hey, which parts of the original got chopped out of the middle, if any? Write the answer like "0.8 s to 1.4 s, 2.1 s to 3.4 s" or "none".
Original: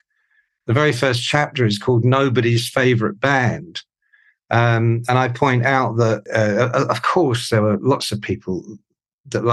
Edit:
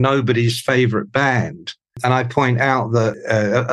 4.0 s to 5.0 s

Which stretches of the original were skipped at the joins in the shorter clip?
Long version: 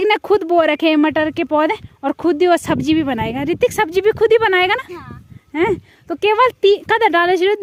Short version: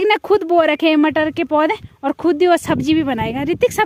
none

